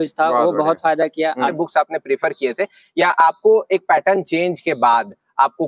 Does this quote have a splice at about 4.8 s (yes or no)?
no